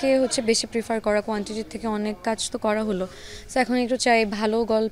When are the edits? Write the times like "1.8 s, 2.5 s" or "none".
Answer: none